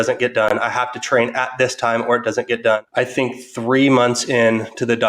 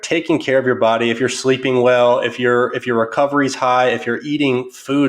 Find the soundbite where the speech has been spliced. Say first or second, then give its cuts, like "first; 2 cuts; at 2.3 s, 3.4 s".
first; 1 cut; at 2.8 s